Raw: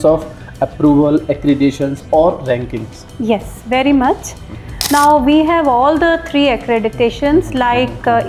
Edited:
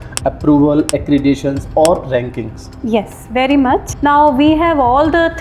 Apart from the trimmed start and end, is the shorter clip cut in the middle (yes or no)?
yes